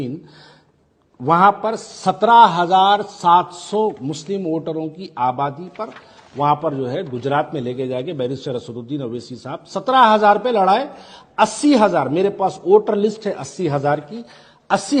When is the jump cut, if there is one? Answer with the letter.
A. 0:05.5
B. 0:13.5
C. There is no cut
C